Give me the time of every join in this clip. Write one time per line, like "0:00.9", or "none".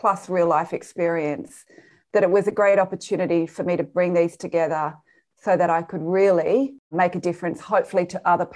0:06.8